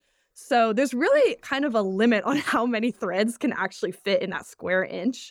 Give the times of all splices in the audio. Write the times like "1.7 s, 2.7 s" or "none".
none